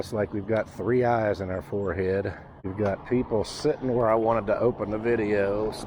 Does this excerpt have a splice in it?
yes; 1 cut; at 2.7 s

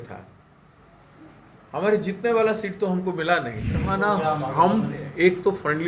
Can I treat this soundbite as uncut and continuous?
no; 1 cut; at 3.9 s

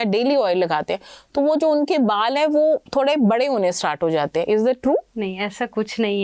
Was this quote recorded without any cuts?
no; 1 cut; at 5.1 s

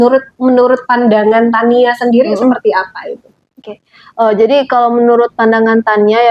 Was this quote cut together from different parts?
no; 0 cuts

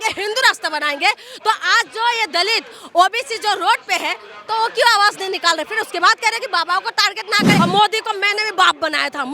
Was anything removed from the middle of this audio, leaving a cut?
yes; 1 cut; at 7.6 s

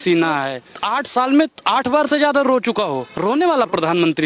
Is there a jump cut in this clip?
yes; 1 cut; at 3.1 s

